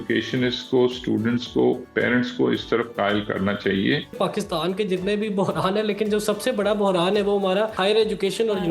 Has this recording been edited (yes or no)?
yes